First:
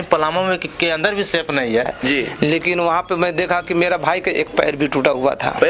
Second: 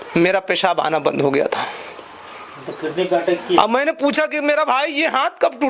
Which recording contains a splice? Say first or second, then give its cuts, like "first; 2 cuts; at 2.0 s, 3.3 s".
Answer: first; 1 cut; at 1.9 s